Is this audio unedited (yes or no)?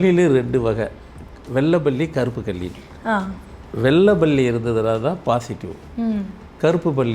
yes